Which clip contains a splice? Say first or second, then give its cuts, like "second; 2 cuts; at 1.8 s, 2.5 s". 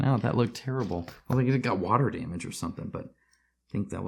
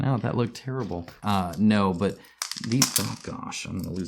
second; 1 cut; at 1.1 s